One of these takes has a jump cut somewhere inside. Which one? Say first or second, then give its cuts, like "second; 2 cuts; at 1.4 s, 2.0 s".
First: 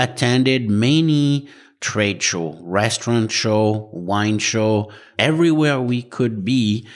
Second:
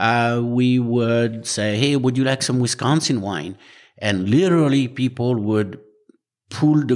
first; 1 cut; at 5.0 s